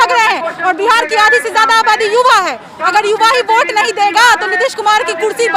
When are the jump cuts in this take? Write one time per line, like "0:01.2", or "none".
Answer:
none